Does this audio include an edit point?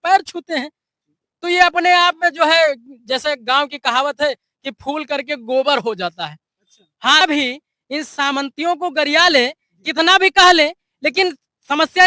yes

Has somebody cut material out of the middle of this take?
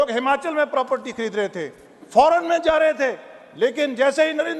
no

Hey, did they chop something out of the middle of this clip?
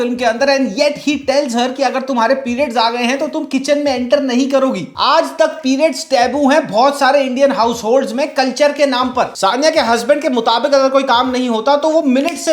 no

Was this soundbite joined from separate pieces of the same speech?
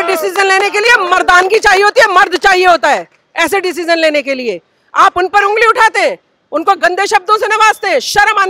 no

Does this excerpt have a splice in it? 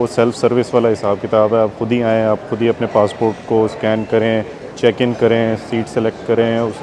no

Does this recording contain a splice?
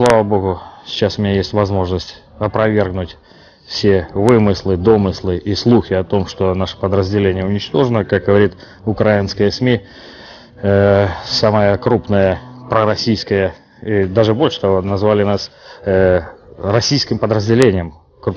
yes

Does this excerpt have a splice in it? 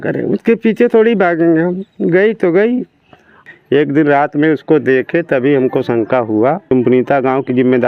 yes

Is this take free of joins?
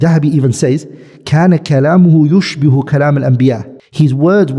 yes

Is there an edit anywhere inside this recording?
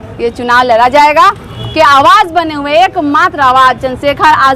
yes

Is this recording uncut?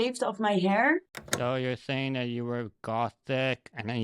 no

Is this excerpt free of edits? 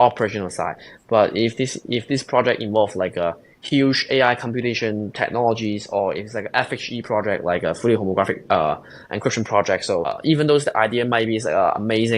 no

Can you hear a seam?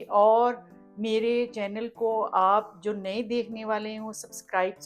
no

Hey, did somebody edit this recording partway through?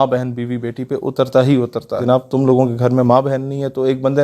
yes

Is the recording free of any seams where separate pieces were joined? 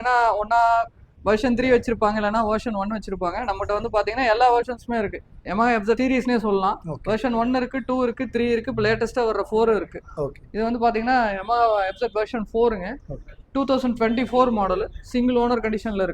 yes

